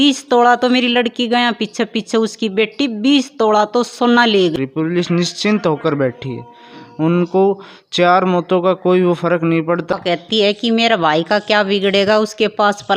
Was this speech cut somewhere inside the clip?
yes; 2 cuts; at 4.5 s, 9.9 s

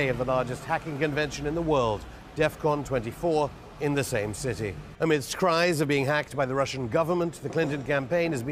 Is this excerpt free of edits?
yes; 0 cuts

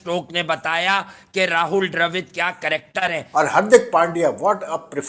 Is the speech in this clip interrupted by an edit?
yes; 1 cut; at 3.2 s

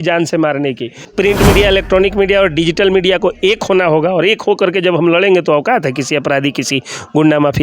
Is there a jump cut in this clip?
yes; 1 cut; at 1.0 s

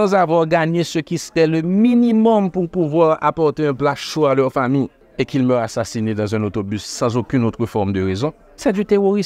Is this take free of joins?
no; 1 cut; at 5.0 s

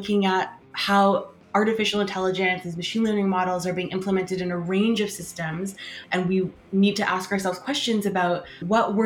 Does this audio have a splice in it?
no; 0 cuts

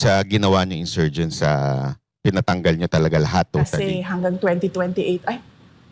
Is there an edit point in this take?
yes; 1 cut; at 3.8 s

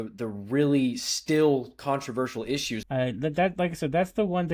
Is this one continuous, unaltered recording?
no; 1 cut; at 2.8 s

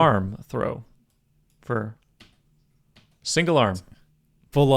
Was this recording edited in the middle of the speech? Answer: no; 0 cuts

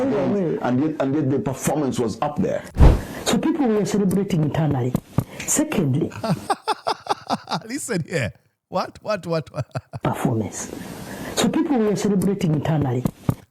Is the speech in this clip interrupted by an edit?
yes; 2 cuts; at 2.7 s, 5.2 s

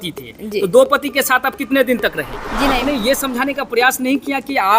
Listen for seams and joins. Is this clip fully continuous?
no; 1 cut; at 2.6 s

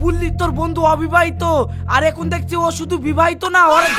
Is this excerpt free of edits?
yes; 0 cuts

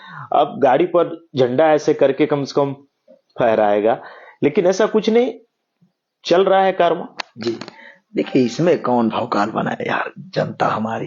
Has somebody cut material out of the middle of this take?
no; 0 cuts

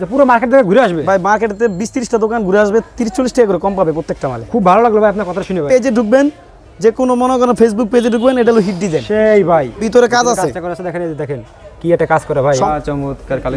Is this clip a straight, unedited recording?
no; 3 cuts; at 5.7 s, 9.8 s, 12.6 s

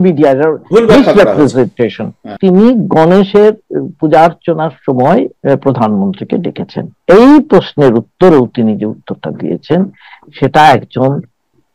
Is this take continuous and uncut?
no; 1 cut; at 2.3 s

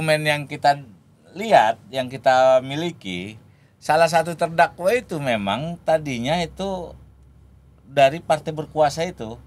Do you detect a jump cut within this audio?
no; 0 cuts

